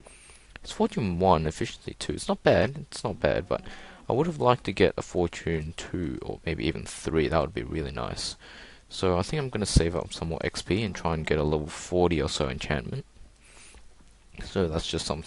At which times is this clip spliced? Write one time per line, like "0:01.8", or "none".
0:09.5